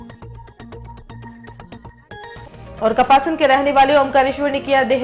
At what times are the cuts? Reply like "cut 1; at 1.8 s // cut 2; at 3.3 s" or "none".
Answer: cut 1; at 1.9 s